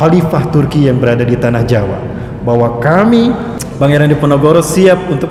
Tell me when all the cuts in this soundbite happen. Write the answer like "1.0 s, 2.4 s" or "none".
none

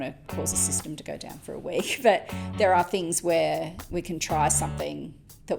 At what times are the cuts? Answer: 3.8 s

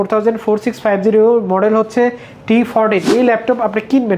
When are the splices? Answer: 3.1 s

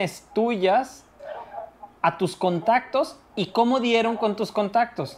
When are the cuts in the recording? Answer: none

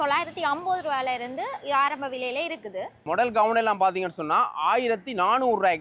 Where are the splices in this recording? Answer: 3.0 s

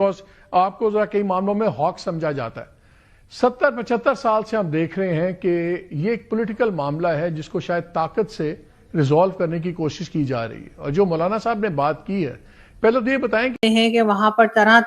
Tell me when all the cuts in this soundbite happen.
13.6 s

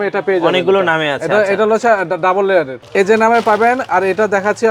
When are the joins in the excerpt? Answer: 2.8 s

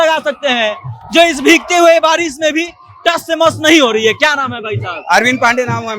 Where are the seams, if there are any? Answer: none

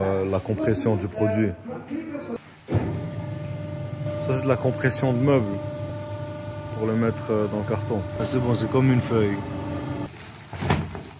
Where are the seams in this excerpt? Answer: 2.4 s, 8.1 s, 10.1 s

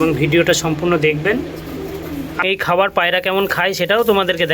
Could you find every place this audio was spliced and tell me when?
2.4 s

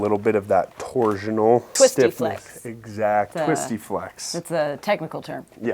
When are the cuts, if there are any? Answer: 1.7 s, 3.3 s

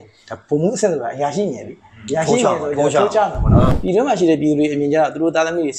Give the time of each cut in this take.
3.7 s

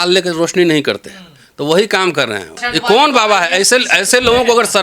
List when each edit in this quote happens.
2.6 s

